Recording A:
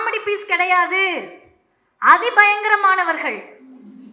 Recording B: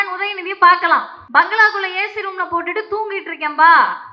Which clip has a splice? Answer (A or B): B